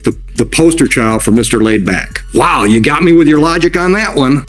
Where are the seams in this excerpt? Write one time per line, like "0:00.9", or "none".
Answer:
0:02.2